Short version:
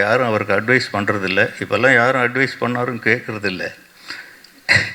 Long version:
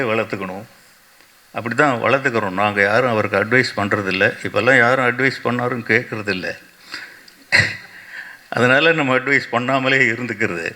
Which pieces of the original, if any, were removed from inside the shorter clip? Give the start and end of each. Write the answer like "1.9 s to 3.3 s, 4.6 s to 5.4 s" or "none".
none